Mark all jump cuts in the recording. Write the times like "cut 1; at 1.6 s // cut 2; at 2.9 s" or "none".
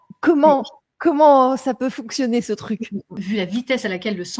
cut 1; at 3.1 s